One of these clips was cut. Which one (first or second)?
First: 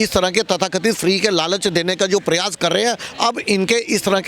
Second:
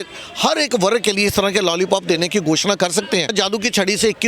second